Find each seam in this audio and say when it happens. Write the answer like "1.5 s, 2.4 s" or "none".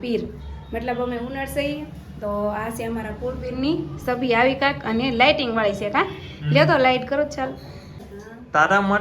8.1 s

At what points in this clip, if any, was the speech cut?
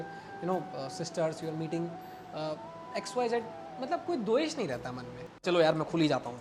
5.4 s

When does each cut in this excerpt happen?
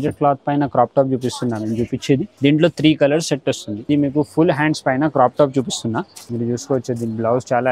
2.3 s, 3.7 s, 6.2 s

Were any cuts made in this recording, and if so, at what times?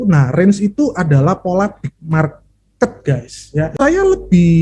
3.7 s

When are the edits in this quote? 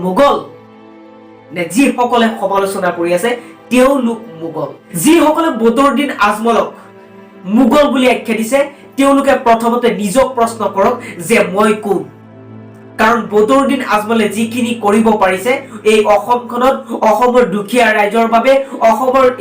4.8 s

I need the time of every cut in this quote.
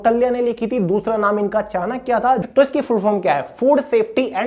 2.4 s

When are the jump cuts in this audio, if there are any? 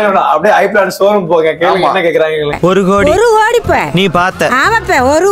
none

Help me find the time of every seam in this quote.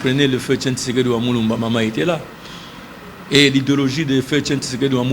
none

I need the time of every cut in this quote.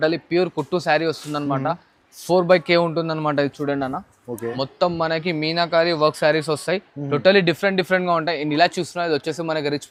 none

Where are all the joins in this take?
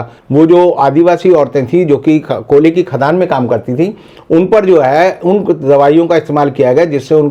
none

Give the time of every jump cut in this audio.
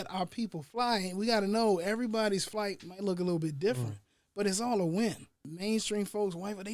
5.5 s

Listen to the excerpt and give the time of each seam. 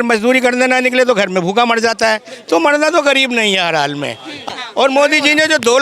4.5 s

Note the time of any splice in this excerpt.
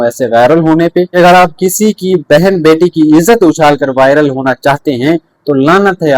1.1 s

